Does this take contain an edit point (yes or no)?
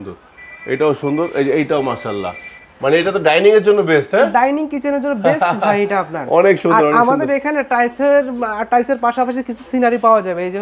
no